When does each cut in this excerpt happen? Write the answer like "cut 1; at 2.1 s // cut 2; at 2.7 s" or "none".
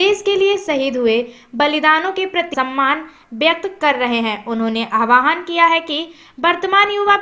cut 1; at 2.5 s

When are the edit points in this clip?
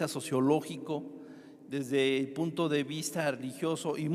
none

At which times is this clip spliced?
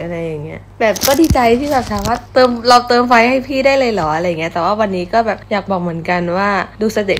cut 1; at 2.2 s // cut 2; at 5.4 s

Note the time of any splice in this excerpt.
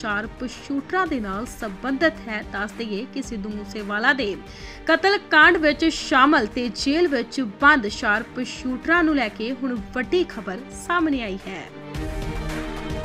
cut 1; at 11.7 s

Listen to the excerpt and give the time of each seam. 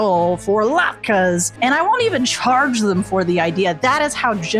none

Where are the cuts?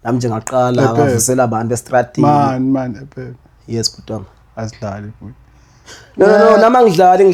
none

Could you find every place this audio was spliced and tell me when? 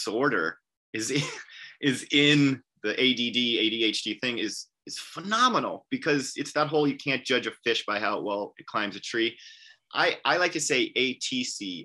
none

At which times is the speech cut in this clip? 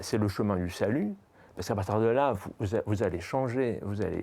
none

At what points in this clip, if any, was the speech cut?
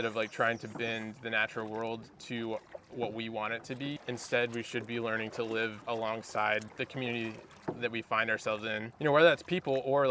cut 1; at 5.8 s // cut 2; at 6.7 s // cut 3; at 8.9 s

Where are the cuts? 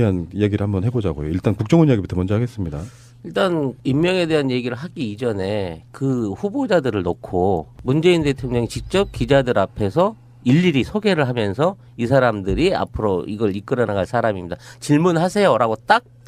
cut 1; at 6.2 s

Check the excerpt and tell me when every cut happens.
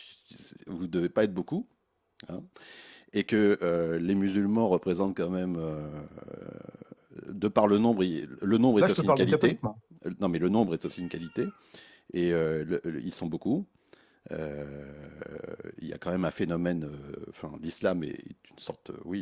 none

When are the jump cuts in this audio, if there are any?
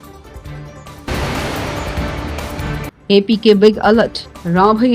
cut 1; at 1.0 s // cut 2; at 2.6 s

